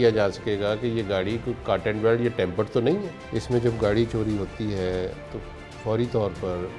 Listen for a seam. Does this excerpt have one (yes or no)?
yes